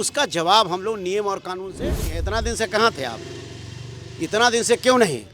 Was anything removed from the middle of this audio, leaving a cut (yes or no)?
yes